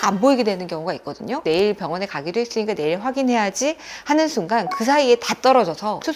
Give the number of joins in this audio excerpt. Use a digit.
1